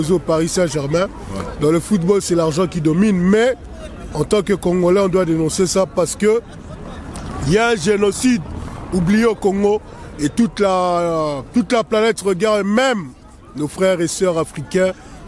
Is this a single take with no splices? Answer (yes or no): yes